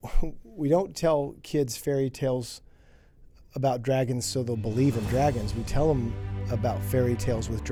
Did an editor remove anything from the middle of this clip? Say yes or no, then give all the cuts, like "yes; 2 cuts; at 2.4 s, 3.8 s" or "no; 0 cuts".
no; 0 cuts